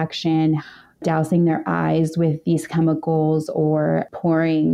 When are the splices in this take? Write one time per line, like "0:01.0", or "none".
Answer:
0:01.0

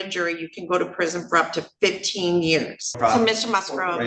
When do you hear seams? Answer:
0:03.0

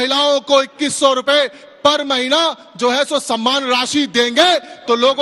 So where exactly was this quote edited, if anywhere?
none

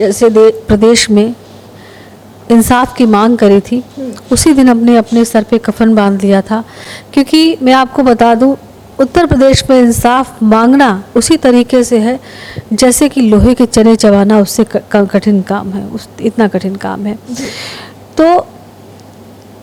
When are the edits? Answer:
none

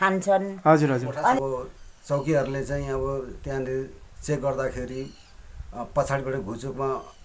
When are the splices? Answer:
0:01.4

